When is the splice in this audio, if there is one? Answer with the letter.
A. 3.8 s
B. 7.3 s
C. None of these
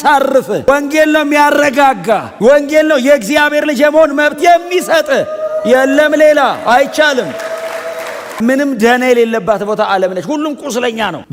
C